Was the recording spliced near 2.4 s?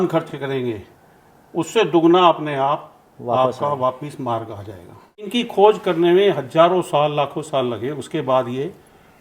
no; 1 cut; at 5.3 s

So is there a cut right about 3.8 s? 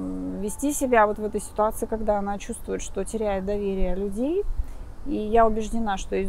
no; 0 cuts

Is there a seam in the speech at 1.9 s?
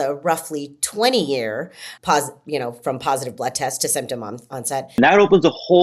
yes; 2 cuts; at 1.9 s, 5.0 s

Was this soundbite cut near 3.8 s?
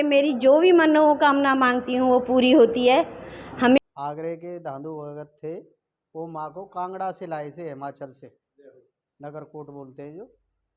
yes; 1 cut; at 3.8 s

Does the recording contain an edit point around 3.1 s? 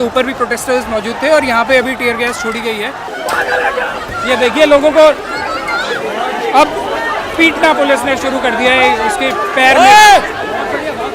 yes; 1 cut; at 3.1 s

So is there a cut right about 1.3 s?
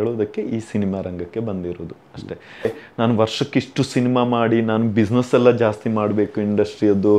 no; 1 cut; at 2.8 s

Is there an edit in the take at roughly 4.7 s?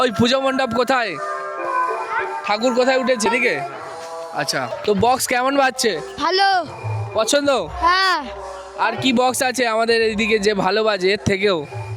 yes; 2 cuts; at 3.3 s, 4.7 s

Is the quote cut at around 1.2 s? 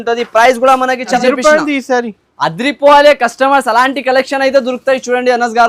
yes; 1 cut; at 1.2 s

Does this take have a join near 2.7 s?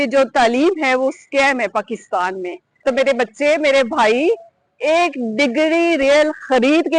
yes; 1 cut; at 2.7 s

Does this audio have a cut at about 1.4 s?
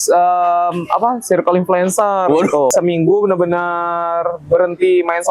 no; 1 cut; at 2.7 s

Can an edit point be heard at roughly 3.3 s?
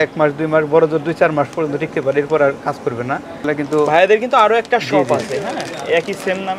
yes; 1 cut; at 3.3 s

